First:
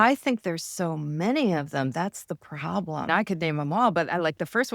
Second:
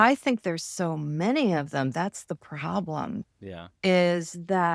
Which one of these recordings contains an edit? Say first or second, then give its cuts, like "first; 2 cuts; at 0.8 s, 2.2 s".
first; 1 cut; at 3.1 s